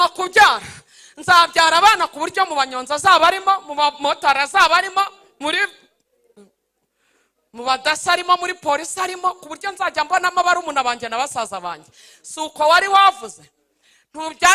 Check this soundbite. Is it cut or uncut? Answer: uncut